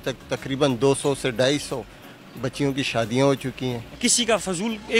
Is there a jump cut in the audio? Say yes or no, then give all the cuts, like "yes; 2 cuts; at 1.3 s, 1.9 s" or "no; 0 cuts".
yes; 1 cut; at 3.9 s